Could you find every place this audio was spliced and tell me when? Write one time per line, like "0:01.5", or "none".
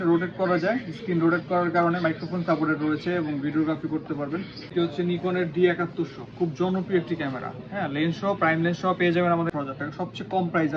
0:04.7
0:09.5